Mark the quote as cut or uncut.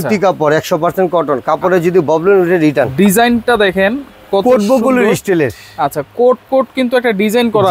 cut